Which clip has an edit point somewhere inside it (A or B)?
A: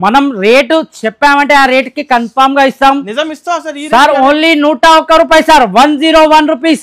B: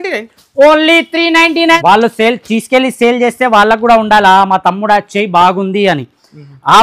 B